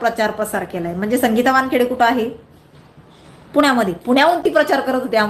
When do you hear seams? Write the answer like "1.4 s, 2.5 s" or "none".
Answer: none